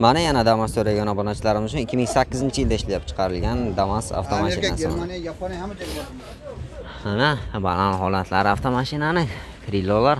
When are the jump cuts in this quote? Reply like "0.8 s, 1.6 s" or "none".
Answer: none